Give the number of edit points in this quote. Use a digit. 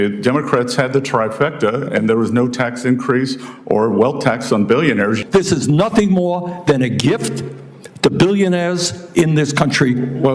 1